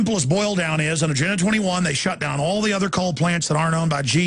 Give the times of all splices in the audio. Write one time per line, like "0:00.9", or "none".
none